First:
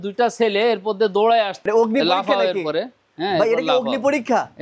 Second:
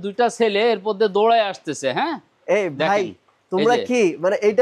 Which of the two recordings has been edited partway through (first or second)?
first